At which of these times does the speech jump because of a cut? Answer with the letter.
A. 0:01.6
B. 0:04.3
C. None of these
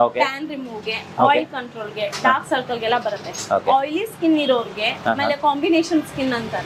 C